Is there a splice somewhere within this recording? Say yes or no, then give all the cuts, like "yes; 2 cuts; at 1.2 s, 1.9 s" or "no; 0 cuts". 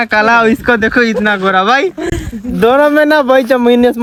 no; 0 cuts